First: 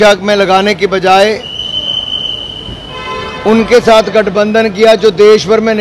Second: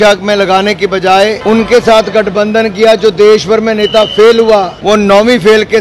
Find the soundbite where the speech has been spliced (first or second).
second